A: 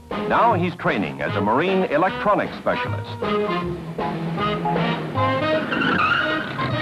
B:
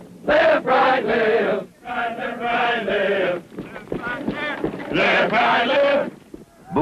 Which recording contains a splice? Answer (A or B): A